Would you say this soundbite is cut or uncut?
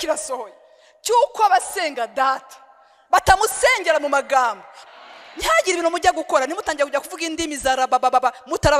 cut